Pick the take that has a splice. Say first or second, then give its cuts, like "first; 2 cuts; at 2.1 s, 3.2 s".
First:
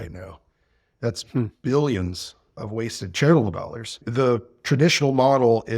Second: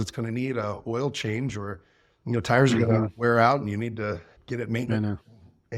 first; 1 cut; at 4.0 s